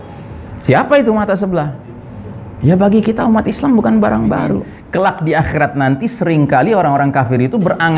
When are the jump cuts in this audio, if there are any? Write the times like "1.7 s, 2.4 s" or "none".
4.7 s